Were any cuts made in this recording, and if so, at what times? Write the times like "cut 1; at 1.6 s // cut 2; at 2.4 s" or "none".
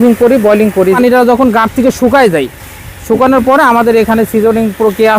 cut 1; at 1.0 s